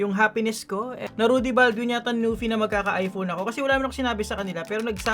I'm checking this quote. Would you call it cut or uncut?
cut